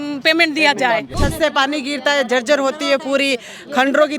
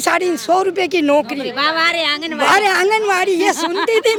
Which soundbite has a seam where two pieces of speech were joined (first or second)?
first